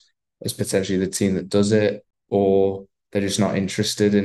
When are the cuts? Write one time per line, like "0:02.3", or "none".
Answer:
0:02.1